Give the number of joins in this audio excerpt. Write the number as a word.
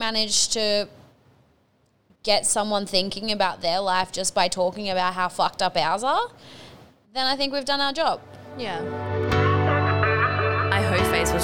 one